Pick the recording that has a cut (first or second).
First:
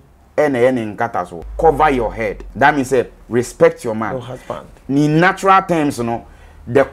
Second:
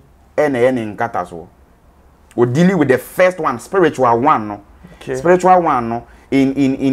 first